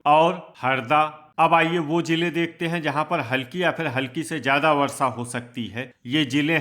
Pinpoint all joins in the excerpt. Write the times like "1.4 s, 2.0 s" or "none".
1.0 s